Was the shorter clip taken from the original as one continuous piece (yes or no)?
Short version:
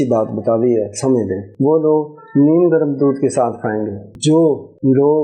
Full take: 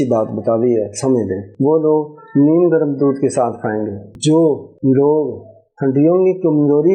yes